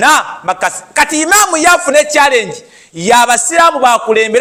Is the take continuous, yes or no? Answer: yes